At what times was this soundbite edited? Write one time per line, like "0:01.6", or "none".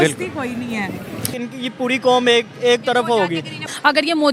0:01.3